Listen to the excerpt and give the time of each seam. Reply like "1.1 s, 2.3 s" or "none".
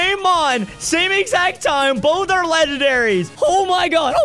3.3 s

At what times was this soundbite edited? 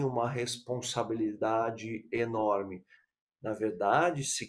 none

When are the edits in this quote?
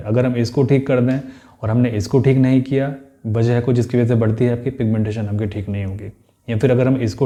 none

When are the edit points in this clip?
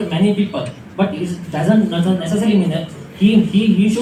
none

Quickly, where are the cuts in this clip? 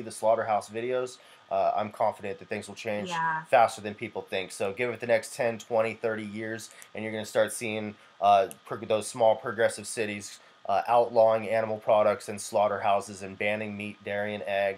none

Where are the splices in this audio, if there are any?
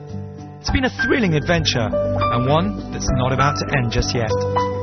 none

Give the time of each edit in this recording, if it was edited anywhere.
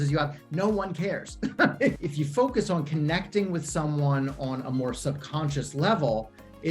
1.9 s

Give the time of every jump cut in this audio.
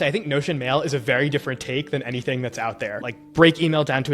2.9 s

